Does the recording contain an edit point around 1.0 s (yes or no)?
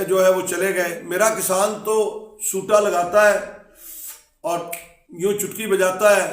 yes